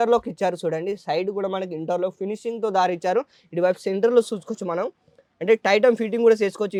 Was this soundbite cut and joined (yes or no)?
no